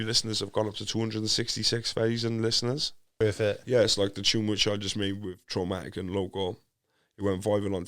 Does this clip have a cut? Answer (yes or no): yes